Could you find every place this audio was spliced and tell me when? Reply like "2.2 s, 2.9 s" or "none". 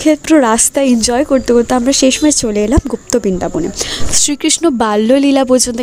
4.0 s